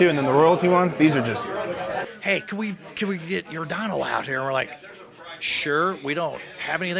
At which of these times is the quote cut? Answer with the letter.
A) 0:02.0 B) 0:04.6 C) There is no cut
A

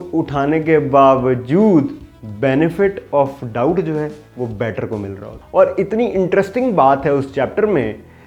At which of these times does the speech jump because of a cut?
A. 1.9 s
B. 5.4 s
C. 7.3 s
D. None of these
B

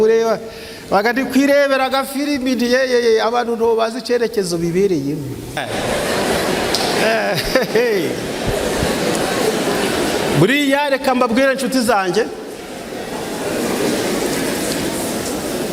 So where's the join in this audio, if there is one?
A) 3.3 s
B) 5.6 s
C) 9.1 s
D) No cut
B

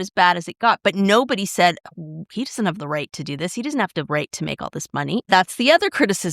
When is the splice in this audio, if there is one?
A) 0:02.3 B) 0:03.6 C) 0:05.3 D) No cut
C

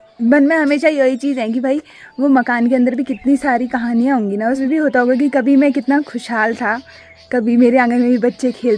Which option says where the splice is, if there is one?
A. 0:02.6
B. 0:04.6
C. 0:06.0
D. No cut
B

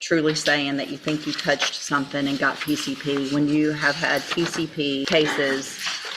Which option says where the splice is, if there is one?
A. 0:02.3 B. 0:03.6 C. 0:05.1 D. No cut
C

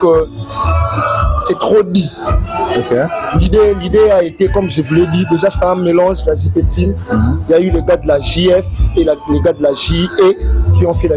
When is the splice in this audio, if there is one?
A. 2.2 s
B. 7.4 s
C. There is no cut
C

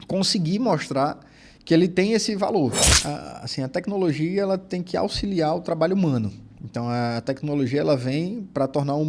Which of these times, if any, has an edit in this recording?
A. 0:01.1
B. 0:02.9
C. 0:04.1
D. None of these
B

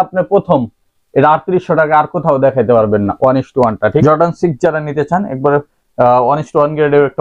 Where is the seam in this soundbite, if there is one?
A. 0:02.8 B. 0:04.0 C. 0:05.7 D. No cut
B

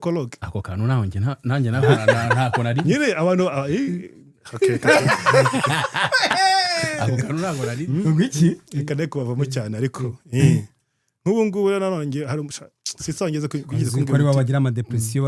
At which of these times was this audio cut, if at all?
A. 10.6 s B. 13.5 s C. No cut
C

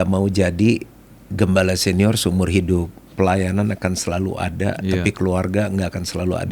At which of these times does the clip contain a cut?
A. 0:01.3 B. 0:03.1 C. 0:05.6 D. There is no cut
B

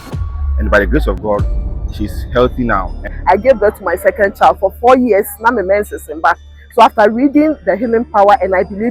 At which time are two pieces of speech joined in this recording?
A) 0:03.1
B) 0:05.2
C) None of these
A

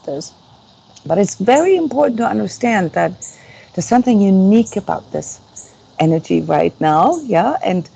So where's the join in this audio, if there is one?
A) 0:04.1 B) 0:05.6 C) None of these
C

